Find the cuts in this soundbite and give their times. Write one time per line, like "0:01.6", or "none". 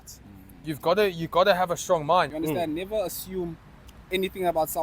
0:02.3